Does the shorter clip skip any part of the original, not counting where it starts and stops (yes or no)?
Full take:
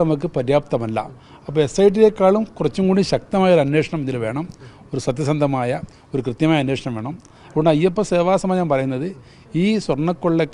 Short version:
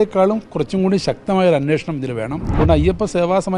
yes